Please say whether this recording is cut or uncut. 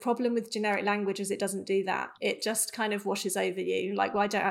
cut